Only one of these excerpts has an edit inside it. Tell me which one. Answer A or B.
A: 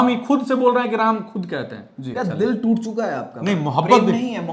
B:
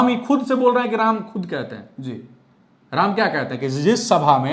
A